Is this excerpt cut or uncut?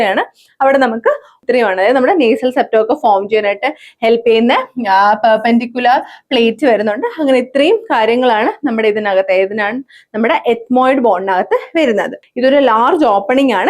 cut